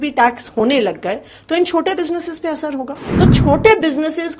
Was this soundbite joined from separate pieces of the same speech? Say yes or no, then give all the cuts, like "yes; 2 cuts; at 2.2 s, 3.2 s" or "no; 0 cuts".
yes; 1 cut; at 3.0 s